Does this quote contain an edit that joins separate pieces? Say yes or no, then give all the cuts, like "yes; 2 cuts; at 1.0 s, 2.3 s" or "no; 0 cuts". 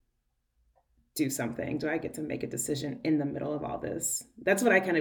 no; 0 cuts